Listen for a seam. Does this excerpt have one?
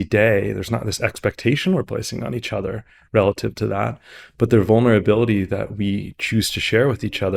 no; 0 cuts

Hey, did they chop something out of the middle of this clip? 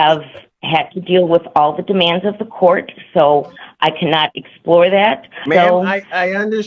yes; 1 cut; at 5.4 s

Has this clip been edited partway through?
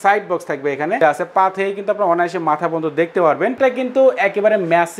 yes; 2 cuts; at 1.0 s, 3.5 s

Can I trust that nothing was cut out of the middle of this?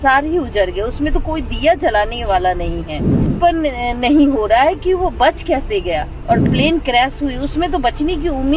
no; 2 cuts; at 3.3 s, 6.4 s

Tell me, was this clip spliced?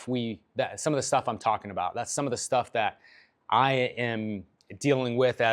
no; 0 cuts

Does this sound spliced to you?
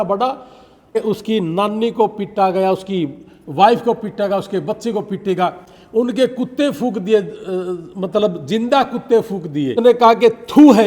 yes; 2 cuts; at 1.0 s, 9.8 s

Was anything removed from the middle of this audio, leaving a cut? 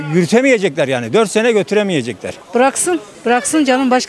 yes; 1 cut; at 2.3 s

